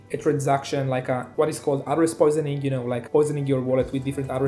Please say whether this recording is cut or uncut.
uncut